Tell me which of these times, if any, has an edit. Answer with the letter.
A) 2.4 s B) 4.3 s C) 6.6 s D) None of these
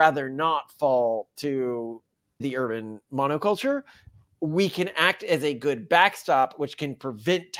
A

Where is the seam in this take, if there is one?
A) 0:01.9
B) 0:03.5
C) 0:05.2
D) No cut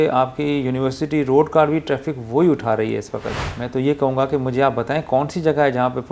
B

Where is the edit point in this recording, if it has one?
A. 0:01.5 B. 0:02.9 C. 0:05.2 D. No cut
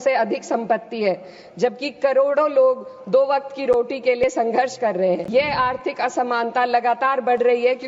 C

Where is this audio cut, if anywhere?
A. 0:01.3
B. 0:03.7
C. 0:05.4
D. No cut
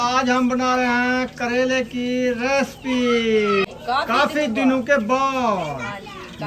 B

